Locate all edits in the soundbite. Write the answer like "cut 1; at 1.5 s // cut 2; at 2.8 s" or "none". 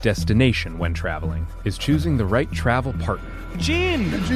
cut 1; at 1.4 s